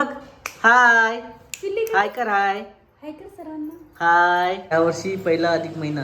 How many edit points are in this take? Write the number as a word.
one